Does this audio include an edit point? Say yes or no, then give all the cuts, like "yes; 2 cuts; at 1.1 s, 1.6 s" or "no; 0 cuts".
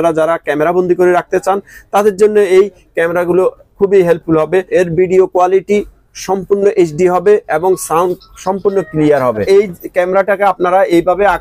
yes; 2 cuts; at 4.7 s, 9.4 s